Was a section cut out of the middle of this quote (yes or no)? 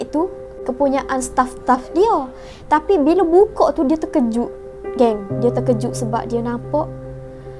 no